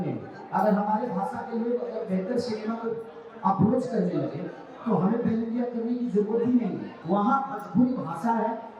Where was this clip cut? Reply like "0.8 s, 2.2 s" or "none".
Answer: 6.9 s